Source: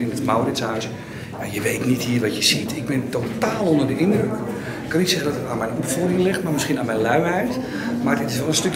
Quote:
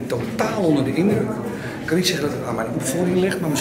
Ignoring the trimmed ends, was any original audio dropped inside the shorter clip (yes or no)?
no